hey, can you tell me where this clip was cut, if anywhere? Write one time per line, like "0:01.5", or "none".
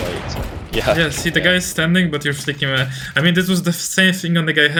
none